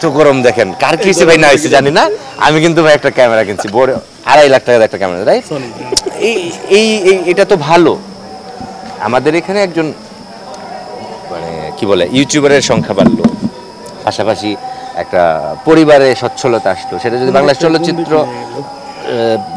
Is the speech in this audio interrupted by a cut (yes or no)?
no